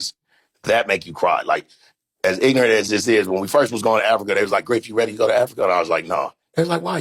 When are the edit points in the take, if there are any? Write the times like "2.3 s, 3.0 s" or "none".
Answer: none